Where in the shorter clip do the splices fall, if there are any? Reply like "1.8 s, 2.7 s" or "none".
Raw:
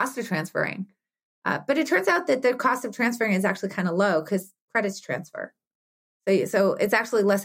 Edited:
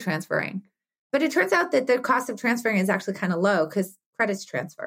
1.1 s